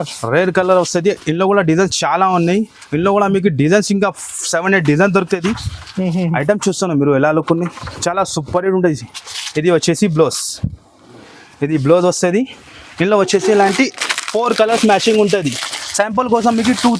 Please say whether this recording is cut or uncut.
uncut